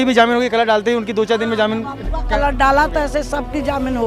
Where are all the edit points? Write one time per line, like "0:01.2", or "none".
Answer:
none